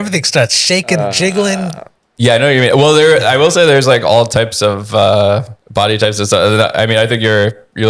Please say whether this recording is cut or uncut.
cut